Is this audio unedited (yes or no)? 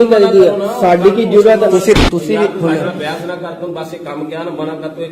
no